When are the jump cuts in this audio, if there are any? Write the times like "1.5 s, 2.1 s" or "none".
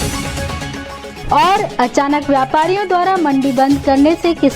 1.1 s